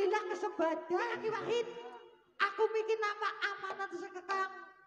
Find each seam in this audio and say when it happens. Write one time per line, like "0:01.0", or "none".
0:01.1